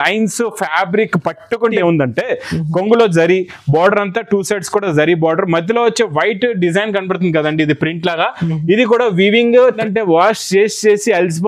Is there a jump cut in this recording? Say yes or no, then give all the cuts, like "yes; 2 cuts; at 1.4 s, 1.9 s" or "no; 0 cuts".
yes; 2 cuts; at 1.7 s, 9.8 s